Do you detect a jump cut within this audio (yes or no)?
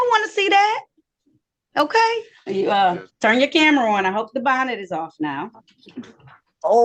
yes